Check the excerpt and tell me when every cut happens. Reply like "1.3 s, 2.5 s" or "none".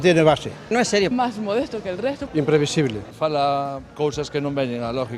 3.0 s